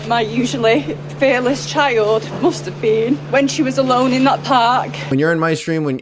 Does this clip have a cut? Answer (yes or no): yes